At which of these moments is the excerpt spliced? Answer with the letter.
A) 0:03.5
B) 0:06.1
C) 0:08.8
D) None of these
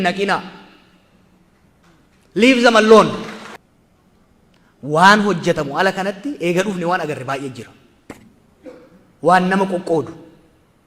A